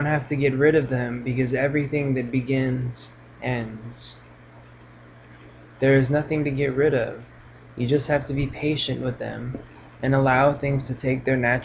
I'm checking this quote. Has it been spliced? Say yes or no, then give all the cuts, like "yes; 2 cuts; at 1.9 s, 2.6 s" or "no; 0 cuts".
no; 0 cuts